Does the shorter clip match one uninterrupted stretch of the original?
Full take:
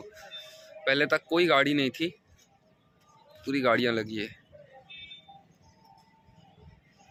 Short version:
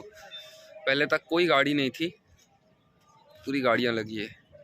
yes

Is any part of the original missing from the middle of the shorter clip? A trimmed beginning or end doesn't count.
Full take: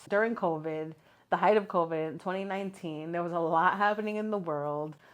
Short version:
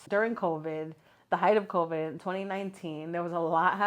no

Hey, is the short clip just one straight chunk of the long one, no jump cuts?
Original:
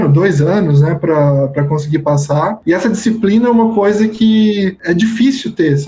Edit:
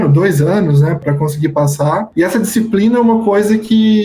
no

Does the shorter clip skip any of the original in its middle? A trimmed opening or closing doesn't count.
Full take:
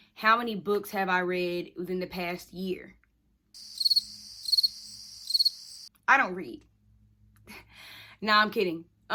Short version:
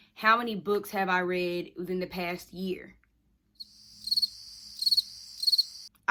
no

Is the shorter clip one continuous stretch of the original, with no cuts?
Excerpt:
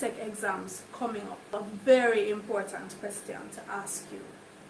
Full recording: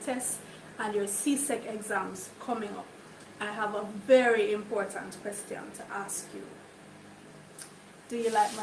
no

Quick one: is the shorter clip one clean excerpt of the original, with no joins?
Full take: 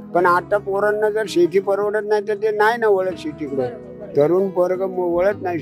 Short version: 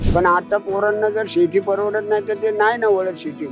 yes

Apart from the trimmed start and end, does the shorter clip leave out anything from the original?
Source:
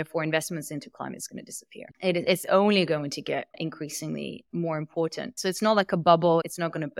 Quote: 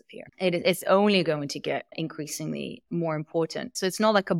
no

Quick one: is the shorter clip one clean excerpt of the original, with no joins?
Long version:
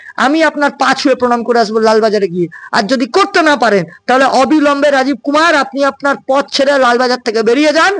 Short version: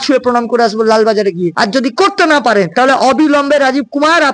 no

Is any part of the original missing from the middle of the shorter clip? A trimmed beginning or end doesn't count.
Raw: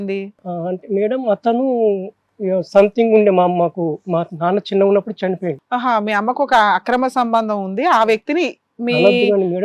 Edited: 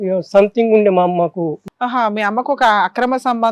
yes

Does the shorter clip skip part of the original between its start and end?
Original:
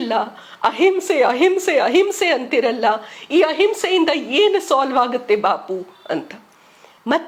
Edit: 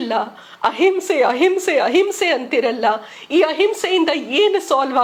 no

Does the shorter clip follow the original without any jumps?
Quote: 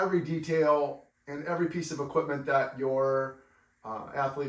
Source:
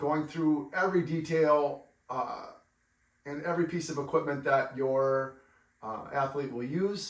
no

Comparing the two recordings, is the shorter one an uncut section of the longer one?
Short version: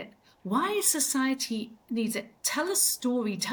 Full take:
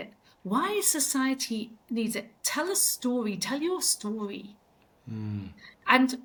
yes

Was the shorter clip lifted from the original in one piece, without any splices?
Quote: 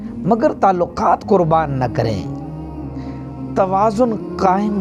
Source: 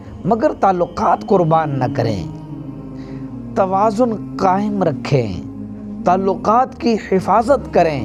yes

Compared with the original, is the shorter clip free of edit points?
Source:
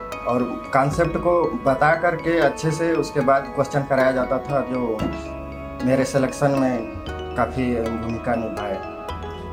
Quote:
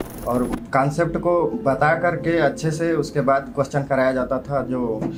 yes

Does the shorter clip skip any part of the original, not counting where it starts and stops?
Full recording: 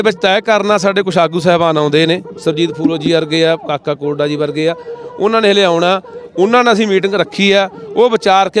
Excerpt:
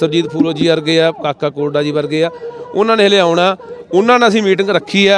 no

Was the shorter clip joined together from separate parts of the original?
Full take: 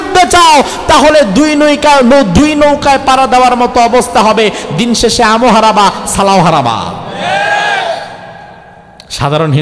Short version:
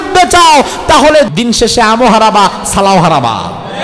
yes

